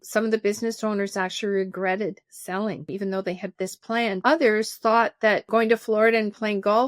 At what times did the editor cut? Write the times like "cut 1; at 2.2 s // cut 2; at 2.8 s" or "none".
cut 1; at 2.9 s // cut 2; at 4.2 s // cut 3; at 5.5 s